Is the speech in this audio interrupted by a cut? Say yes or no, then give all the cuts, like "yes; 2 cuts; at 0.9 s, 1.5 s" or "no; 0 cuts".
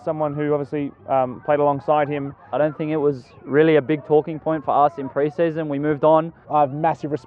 yes; 2 cuts; at 2.4 s, 6.4 s